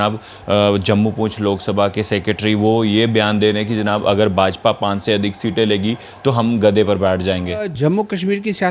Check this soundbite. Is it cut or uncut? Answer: cut